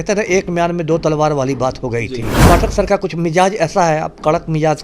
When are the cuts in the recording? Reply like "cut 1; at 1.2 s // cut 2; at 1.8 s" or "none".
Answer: cut 1; at 2.4 s